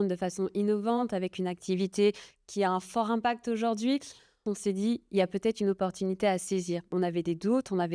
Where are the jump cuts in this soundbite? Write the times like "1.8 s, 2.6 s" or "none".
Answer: 4.4 s, 6.9 s